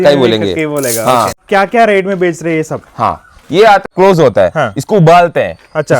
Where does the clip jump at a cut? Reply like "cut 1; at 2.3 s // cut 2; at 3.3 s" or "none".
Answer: cut 1; at 1.4 s // cut 2; at 3.9 s

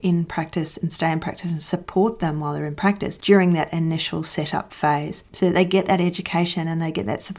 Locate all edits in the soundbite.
none

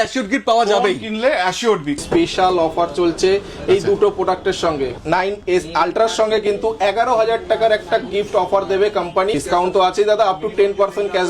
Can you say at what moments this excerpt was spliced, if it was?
cut 1; at 2.0 s // cut 2; at 4.9 s // cut 3; at 9.4 s

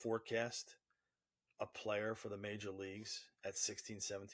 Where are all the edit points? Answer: none

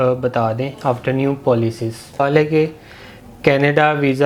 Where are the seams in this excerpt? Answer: cut 1; at 2.2 s

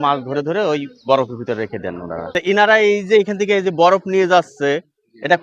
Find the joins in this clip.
cut 1; at 2.2 s

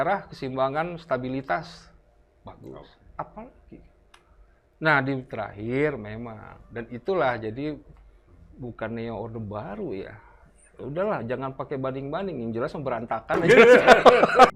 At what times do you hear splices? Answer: none

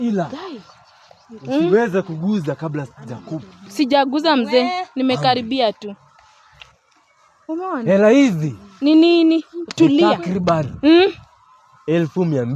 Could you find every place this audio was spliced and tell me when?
none

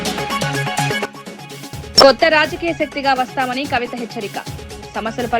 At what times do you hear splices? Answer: none

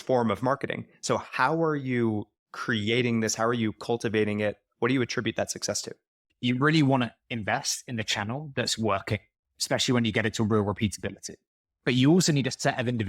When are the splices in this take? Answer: cut 1; at 6.2 s

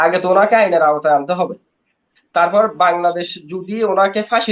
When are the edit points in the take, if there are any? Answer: none

